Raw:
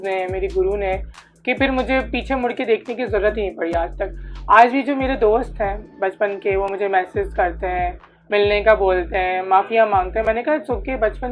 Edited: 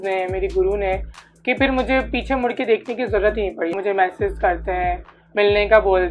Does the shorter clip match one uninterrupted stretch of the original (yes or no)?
no